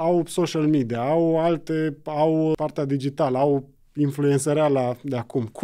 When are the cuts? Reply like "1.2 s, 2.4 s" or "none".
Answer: 2.5 s